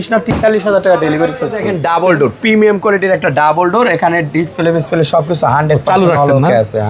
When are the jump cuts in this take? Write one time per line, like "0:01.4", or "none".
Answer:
none